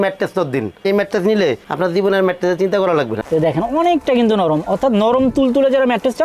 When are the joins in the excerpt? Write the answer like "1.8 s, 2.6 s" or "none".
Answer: 0.8 s, 3.2 s